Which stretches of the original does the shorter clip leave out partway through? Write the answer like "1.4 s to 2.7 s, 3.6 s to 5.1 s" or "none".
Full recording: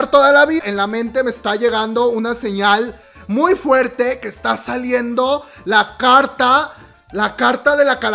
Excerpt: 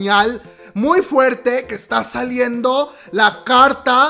none